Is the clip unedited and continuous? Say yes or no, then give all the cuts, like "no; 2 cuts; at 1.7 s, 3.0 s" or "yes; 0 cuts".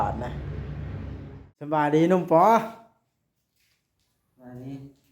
no; 1 cut; at 1.7 s